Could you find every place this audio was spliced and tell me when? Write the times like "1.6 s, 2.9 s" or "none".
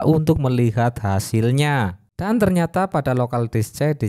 2.1 s